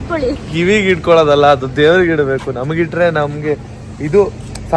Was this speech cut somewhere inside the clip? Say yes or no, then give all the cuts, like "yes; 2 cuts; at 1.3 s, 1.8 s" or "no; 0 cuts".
no; 0 cuts